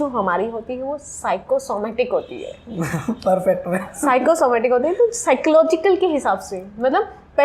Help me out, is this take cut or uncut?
uncut